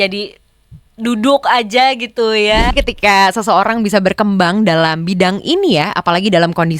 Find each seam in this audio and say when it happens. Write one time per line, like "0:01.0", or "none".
0:02.7

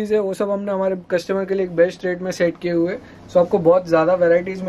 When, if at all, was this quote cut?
none

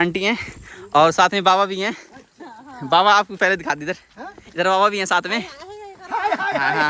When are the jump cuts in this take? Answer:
none

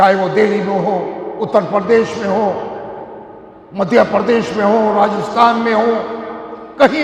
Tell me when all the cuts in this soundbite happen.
none

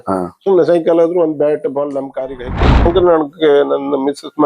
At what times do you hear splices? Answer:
0:02.9

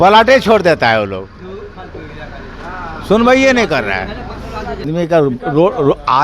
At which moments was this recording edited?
0:04.9

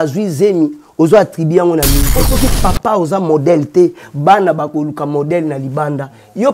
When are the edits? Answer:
0:02.2

